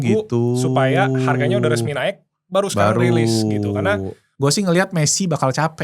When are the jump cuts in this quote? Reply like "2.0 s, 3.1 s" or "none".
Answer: 4.3 s